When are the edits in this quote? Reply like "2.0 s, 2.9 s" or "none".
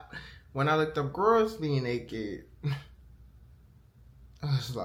none